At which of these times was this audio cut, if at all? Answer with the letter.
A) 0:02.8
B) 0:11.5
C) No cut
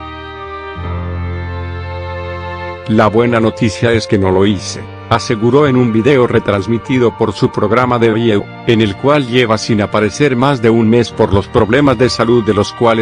A